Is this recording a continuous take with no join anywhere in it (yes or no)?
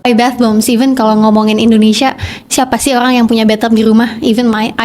yes